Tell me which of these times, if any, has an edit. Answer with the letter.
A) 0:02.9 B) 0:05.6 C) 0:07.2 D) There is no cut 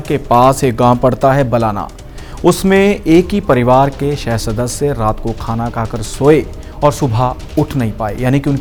D